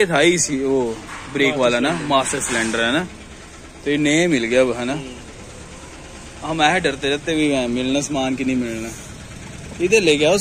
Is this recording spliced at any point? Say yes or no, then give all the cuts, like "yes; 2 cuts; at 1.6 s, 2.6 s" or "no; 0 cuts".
no; 0 cuts